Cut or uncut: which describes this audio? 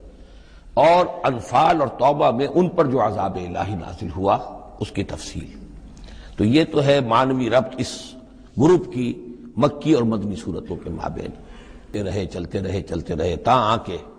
cut